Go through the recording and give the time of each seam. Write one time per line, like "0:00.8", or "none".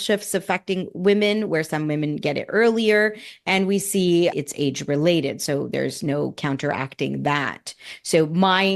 none

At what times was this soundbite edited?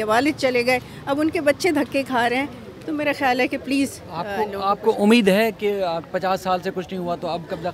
none

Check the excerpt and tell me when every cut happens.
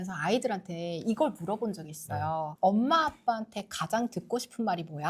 none

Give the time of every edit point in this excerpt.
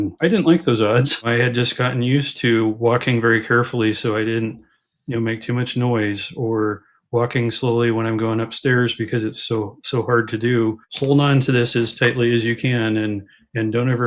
0:01.3
0:10.9

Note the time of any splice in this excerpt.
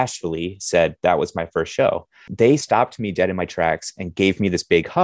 0:02.2

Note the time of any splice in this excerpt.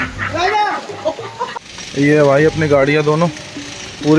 0:01.6

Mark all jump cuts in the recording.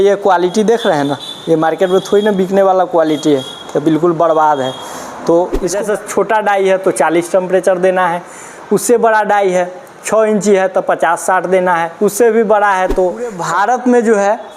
0:05.8
0:13.4

